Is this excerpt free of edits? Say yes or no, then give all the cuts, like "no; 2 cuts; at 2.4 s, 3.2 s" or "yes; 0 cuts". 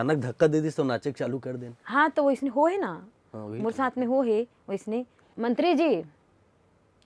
no; 1 cut; at 5.2 s